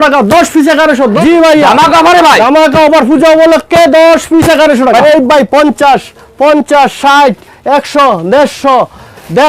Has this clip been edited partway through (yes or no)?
yes